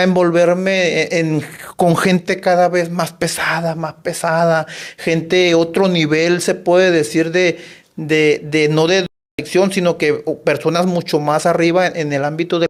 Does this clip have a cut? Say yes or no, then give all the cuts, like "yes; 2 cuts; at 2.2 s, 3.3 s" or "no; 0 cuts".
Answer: no; 0 cuts